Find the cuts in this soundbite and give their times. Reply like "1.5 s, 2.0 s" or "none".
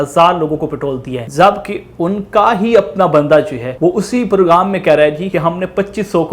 1.2 s, 3.6 s, 5.2 s